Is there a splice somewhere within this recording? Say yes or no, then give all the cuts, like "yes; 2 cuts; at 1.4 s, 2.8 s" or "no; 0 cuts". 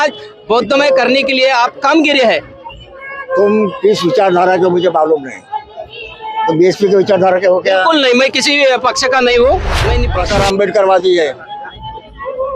yes; 1 cut; at 10.0 s